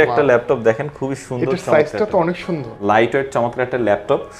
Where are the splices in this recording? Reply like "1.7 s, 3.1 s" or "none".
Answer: 2.7 s